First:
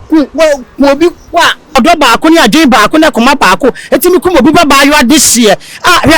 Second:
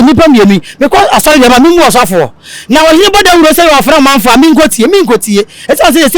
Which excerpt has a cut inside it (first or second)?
first